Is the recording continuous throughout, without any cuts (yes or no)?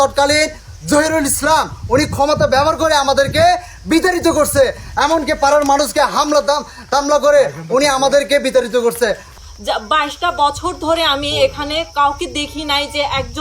no